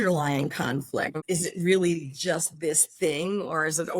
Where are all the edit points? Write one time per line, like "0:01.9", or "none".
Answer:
0:01.2